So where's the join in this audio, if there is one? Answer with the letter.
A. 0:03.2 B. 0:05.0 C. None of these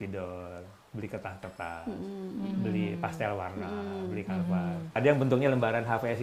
B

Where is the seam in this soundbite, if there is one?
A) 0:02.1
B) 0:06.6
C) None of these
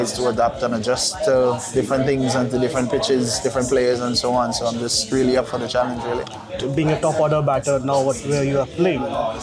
B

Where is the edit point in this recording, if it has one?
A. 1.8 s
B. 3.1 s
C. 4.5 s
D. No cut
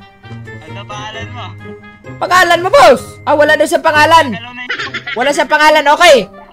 B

